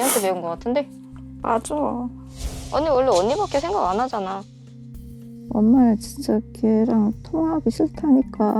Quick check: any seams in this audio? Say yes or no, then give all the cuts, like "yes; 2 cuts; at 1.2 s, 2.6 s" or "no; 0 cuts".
no; 0 cuts